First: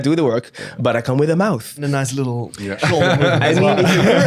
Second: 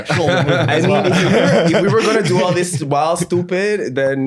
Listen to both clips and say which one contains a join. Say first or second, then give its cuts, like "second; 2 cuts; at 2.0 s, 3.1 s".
first; 1 cut; at 1.8 s